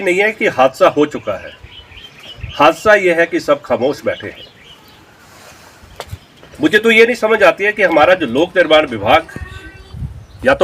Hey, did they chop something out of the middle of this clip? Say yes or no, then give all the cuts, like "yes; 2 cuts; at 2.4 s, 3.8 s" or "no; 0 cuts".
no; 0 cuts